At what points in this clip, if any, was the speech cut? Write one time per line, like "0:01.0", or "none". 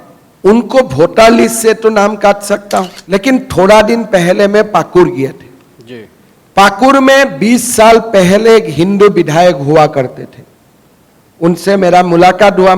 0:03.0